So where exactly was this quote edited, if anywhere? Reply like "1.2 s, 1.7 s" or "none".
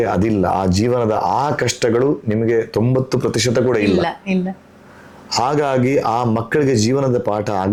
none